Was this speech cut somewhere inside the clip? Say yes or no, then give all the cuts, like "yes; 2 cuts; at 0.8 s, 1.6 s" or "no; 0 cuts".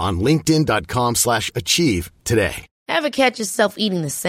yes; 1 cut; at 2.7 s